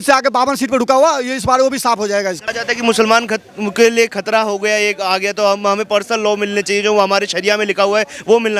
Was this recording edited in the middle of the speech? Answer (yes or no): no